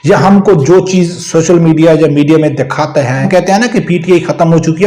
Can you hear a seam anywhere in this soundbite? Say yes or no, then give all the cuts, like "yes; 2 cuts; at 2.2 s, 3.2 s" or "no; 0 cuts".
yes; 1 cut; at 3.3 s